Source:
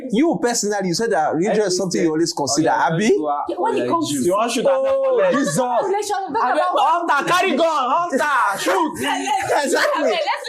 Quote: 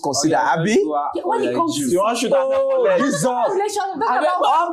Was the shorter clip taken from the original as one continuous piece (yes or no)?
yes